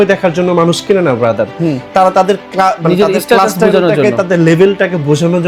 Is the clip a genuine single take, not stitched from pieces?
yes; 0 cuts

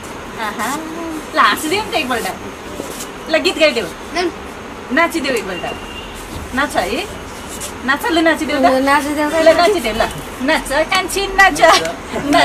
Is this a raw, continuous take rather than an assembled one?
yes; 0 cuts

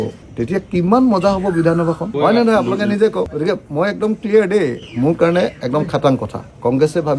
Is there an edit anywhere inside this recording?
no; 0 cuts

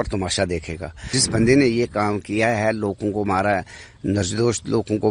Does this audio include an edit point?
yes; 1 cut; at 1.1 s

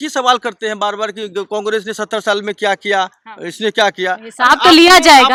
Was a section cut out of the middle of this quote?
no; 0 cuts

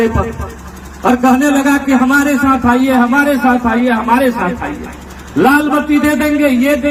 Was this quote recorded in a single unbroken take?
yes; 0 cuts

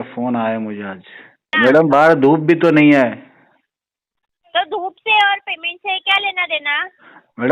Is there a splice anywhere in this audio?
yes; 1 cut; at 1.5 s

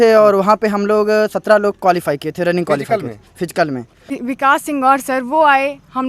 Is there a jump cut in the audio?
yes; 1 cut; at 4.1 s

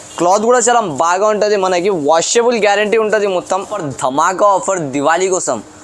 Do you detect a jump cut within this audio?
yes; 1 cut; at 3.7 s

